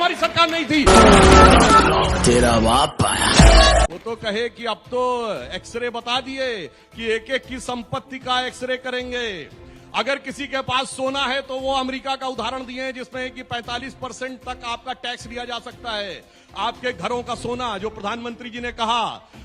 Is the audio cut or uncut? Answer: cut